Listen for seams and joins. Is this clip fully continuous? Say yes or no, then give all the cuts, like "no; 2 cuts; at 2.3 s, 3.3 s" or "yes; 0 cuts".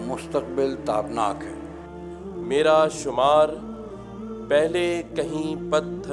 no; 1 cut; at 1.8 s